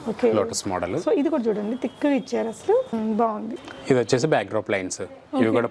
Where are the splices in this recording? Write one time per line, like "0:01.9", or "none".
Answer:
0:03.5